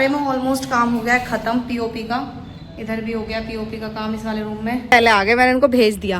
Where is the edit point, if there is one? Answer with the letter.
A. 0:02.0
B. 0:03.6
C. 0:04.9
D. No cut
C